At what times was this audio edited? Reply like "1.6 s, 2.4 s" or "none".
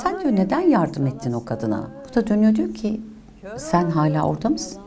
2.0 s